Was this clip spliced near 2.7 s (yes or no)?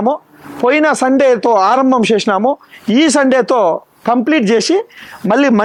no